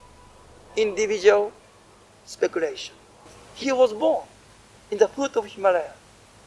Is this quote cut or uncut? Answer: cut